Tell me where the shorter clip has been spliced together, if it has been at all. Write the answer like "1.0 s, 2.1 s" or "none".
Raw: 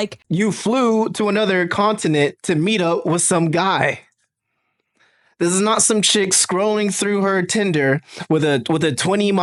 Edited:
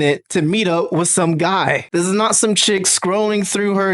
1.8 s